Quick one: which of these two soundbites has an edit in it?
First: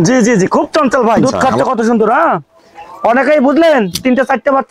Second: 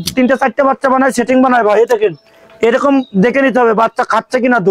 first; 1 cut; at 1.3 s

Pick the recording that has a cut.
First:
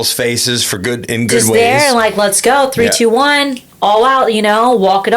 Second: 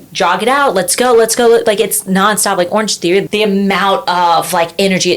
second; 1 cut; at 3.3 s

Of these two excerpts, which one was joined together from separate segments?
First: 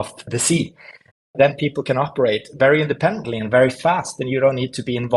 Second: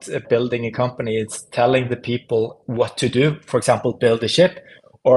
first; 1 cut; at 1.1 s

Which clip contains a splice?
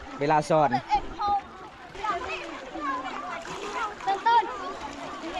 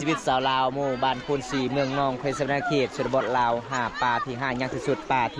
first; 1 cut; at 2.0 s

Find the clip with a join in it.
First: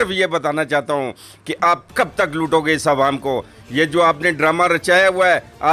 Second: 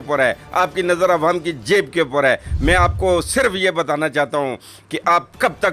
first; 1 cut; at 3.6 s

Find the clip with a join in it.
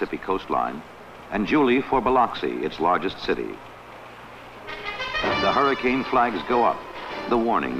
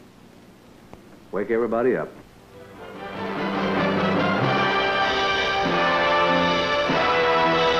second; 1 cut; at 1.1 s

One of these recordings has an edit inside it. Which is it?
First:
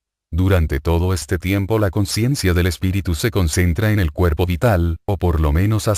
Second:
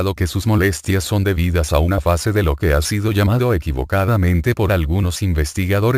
second; 1 cut; at 5.0 s

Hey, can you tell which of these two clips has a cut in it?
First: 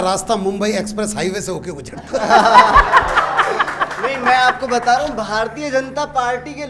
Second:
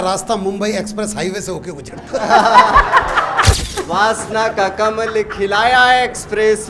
second; 1 cut; at 3.6 s

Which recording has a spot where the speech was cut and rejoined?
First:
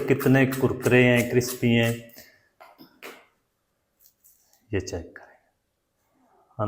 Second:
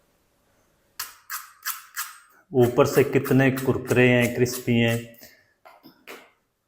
second; 1 cut; at 1.0 s

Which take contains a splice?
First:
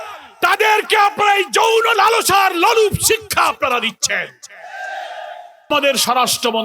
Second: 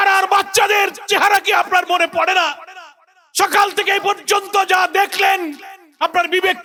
first; 1 cut; at 5.7 s

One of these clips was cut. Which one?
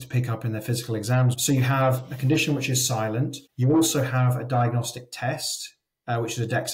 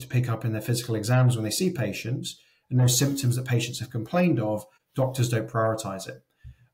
first; 1 cut; at 1.4 s

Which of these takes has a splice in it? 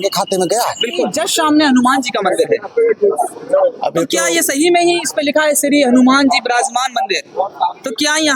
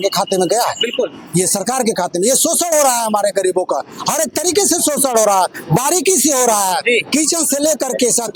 first; 1 cut; at 1.1 s

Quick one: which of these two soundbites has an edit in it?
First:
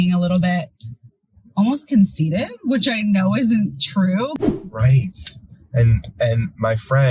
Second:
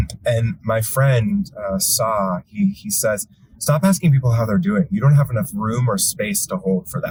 first; 1 cut; at 4.3 s

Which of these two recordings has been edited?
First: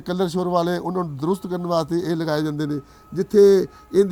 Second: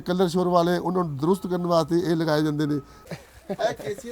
second; 1 cut; at 3.1 s

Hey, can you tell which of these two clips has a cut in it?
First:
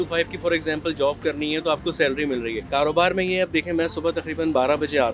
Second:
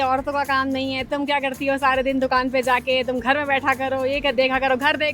first; 1 cut; at 2.6 s

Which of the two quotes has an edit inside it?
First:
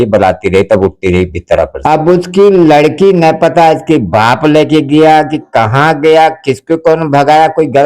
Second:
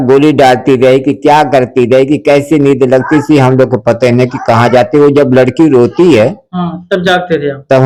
first; 1 cut; at 1.7 s

